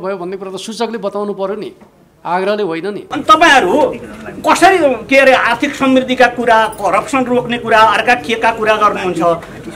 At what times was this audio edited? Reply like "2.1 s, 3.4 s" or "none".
3.0 s